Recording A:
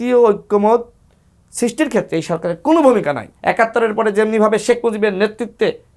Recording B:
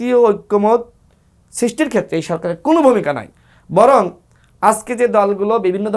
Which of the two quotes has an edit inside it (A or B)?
A